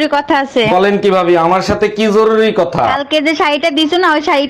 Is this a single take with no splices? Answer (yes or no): yes